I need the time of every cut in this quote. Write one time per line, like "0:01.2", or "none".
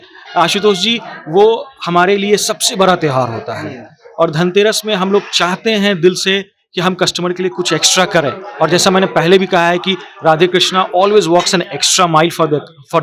none

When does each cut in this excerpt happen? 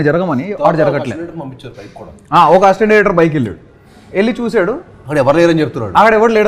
none

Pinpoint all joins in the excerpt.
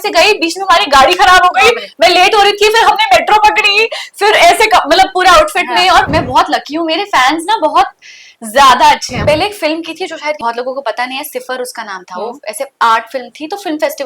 0:06.1
0:09.1
0:10.4

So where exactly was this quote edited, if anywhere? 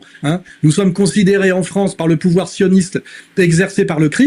none

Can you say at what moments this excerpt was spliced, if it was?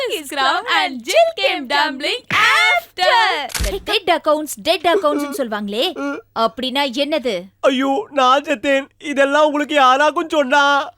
0:03.7

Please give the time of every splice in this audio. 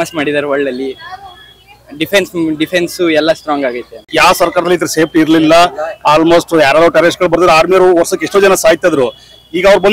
0:03.9

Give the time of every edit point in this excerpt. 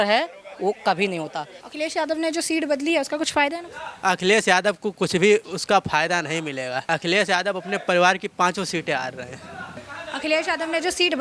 0:01.6
0:06.8
0:09.8

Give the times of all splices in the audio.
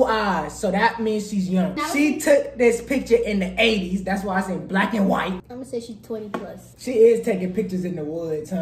0:01.8
0:05.5

